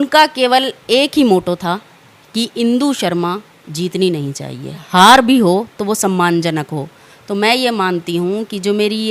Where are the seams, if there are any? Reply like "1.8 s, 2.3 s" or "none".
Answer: 4.8 s